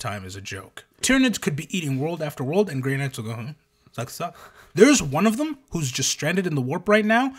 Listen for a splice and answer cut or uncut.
cut